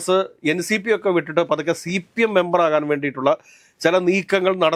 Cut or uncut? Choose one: uncut